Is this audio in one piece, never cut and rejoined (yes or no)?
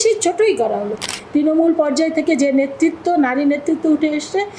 no